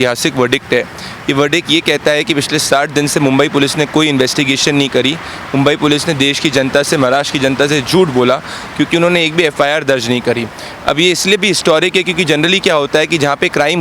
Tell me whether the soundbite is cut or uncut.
uncut